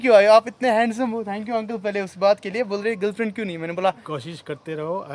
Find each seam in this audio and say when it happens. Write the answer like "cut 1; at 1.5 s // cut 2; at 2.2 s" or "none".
cut 1; at 4.0 s